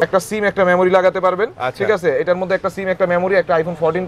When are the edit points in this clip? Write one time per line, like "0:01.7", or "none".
none